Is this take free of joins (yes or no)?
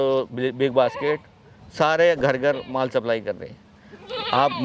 yes